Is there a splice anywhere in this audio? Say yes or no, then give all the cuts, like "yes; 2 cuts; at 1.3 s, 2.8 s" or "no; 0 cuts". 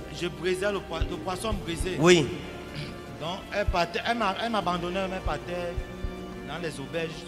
no; 0 cuts